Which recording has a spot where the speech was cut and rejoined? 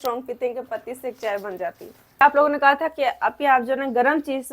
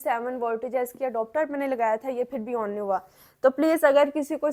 first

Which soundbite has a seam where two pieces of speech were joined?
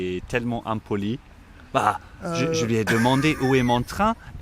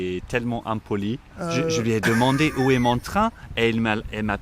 second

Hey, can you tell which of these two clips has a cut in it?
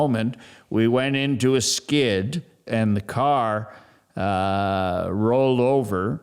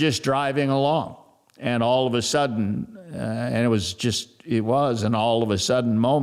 first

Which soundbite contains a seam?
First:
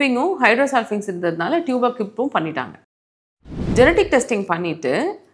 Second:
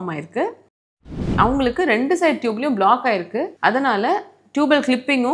second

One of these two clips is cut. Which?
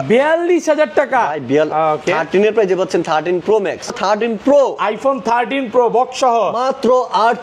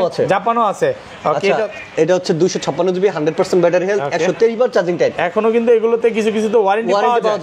first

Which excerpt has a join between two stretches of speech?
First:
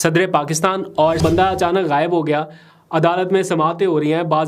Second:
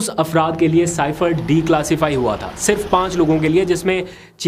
first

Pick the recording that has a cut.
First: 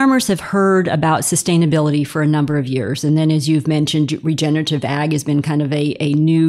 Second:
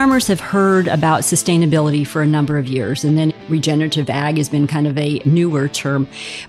second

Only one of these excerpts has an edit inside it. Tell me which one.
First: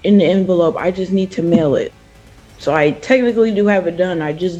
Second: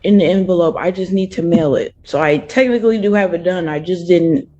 second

